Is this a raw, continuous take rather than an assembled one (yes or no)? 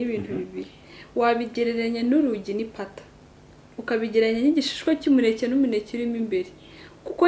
yes